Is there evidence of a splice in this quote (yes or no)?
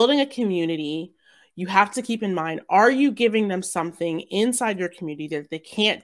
no